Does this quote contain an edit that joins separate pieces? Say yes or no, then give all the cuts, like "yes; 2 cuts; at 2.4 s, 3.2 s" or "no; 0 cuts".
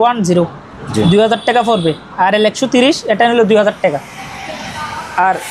no; 0 cuts